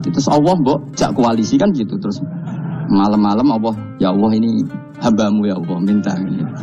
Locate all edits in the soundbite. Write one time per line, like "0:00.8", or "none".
0:00.9
0:03.8